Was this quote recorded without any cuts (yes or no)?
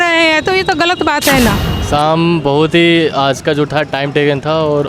no